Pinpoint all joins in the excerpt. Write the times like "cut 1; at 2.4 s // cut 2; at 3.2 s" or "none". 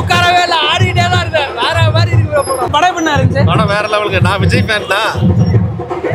cut 1; at 2.7 s